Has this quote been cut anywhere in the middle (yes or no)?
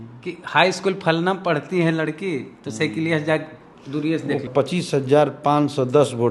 yes